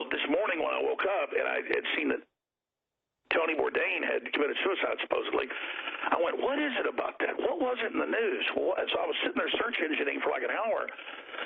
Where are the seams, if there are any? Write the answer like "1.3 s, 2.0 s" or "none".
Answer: none